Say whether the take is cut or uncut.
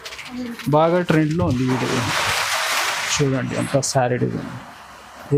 uncut